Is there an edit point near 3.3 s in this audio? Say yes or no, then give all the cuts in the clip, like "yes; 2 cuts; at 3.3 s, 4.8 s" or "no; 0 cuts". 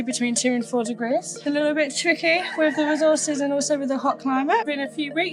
no; 2 cuts; at 1.3 s, 4.6 s